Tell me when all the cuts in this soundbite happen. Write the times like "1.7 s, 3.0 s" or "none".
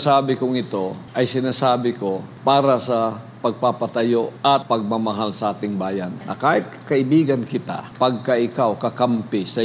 1.0 s, 2.3 s, 4.5 s, 6.2 s, 7.8 s